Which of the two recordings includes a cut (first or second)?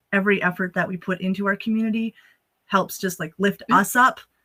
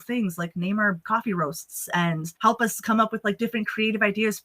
second